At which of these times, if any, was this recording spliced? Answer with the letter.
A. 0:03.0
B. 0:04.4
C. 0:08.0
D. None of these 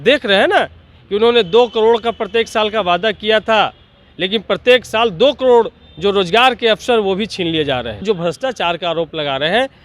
C